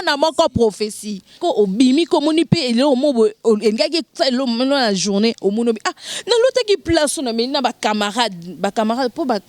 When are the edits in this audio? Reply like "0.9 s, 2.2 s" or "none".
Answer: 1.4 s

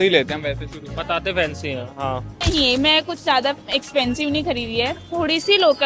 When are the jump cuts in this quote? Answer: 2.5 s

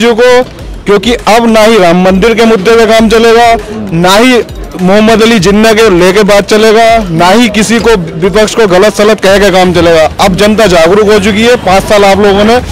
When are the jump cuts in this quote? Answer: none

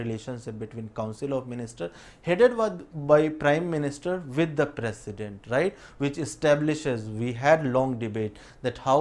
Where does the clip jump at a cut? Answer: none

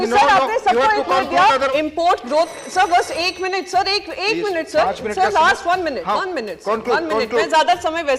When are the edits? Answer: 1.7 s

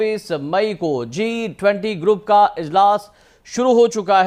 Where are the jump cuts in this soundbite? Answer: none

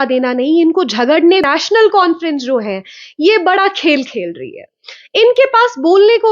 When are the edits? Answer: 1.4 s

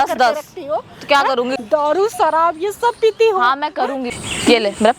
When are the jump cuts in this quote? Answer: 1.6 s, 4.1 s

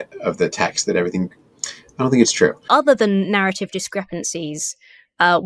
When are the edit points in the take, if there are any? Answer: 2.7 s

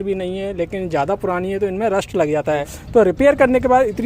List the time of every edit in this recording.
2.8 s

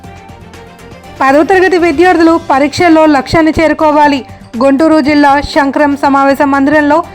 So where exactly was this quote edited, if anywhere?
1.2 s

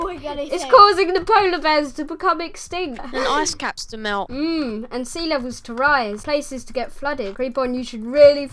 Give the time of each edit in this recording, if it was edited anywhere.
3.1 s, 4.3 s, 6.2 s, 7.3 s

